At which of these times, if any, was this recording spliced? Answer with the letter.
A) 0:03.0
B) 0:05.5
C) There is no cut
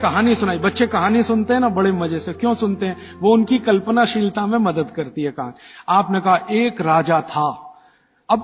C